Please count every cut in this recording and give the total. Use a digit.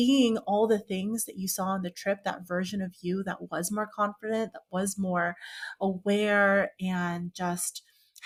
0